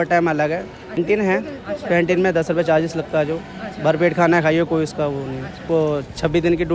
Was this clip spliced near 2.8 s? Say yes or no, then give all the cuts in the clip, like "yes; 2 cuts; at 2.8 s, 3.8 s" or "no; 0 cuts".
no; 2 cuts; at 1.0 s, 5.6 s